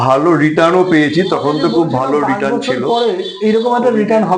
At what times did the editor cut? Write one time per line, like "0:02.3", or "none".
0:02.7